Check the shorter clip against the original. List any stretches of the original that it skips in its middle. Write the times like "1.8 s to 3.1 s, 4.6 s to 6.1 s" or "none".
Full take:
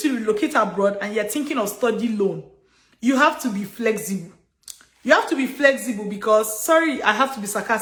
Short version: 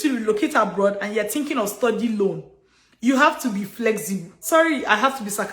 4.4 s to 6.6 s